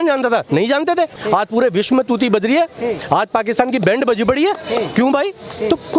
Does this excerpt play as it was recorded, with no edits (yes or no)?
no